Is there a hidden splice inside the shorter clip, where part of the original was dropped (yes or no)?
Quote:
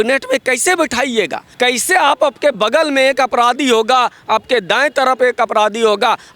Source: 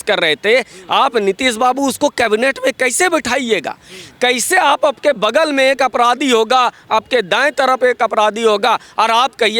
yes